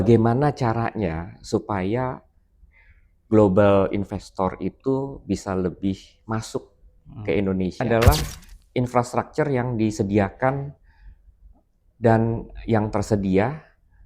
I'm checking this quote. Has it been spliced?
yes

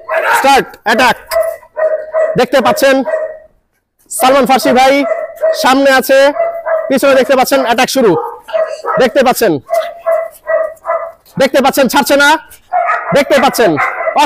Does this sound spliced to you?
no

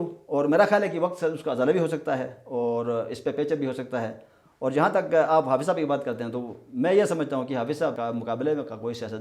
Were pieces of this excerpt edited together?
yes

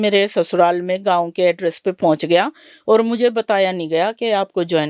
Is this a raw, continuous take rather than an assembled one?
yes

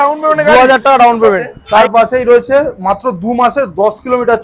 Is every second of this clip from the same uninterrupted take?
no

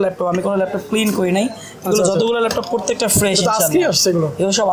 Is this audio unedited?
yes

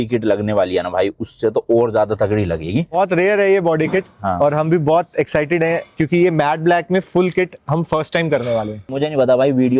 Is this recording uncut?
no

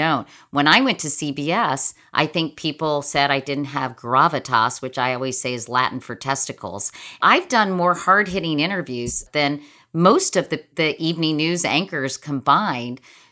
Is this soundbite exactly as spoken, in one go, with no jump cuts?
no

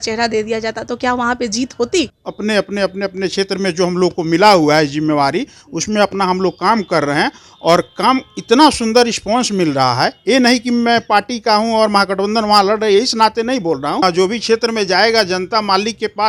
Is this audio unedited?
no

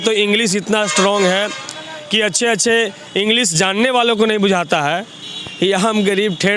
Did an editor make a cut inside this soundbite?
no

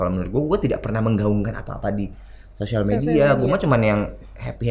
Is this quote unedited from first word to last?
yes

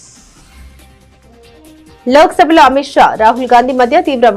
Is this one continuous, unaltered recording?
yes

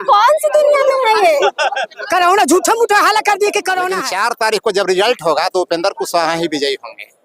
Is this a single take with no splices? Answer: no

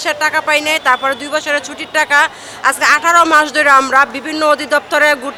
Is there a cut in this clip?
no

